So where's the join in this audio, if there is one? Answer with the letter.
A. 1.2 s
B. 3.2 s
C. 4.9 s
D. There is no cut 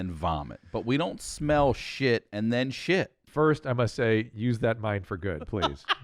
B